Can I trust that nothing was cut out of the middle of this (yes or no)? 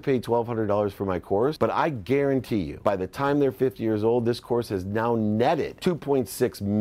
no